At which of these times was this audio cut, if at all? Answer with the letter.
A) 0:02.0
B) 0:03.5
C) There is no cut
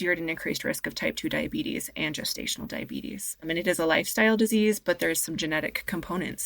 B